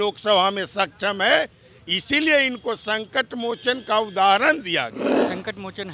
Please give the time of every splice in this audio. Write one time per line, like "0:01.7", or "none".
0:05.0